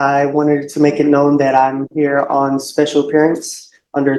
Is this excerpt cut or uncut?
uncut